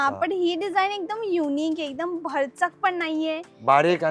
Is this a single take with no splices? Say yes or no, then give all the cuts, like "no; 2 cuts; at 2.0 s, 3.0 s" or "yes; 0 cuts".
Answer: yes; 0 cuts